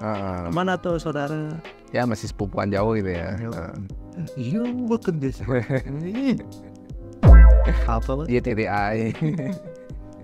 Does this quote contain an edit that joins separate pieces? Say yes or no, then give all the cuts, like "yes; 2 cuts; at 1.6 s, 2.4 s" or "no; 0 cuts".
no; 0 cuts